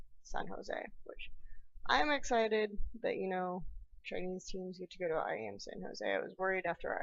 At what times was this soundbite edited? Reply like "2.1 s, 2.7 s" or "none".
2.7 s